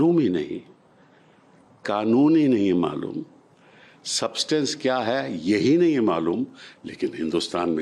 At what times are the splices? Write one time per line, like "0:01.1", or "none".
none